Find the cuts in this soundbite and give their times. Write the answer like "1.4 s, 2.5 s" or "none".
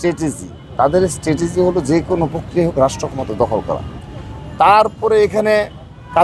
none